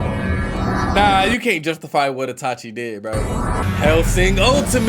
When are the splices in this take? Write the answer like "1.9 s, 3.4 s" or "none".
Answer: 3.6 s